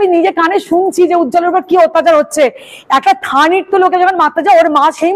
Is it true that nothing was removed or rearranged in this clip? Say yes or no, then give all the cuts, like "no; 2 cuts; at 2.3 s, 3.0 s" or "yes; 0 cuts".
yes; 0 cuts